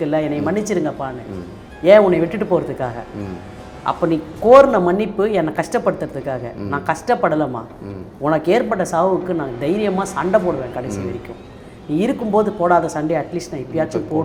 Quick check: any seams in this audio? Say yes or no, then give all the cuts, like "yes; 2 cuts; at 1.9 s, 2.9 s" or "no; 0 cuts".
no; 0 cuts